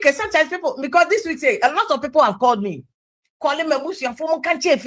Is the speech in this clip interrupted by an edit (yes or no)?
no